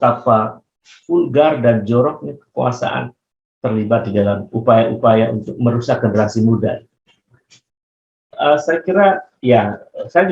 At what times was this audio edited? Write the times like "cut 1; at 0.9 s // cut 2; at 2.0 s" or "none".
cut 1; at 8.2 s